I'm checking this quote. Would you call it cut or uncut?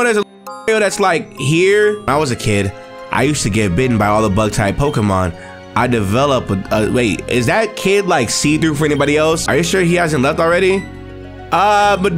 cut